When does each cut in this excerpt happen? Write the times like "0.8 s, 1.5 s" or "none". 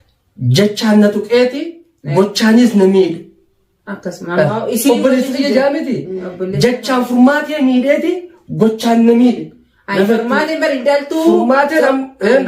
none